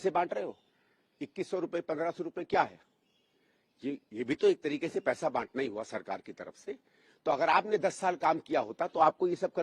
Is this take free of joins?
yes; 0 cuts

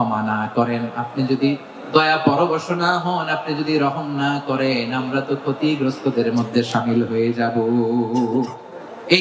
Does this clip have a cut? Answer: no; 0 cuts

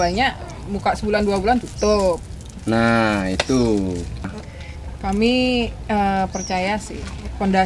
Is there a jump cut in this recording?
yes; 1 cut; at 4.3 s

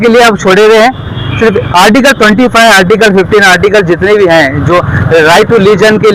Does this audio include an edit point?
no; 0 cuts

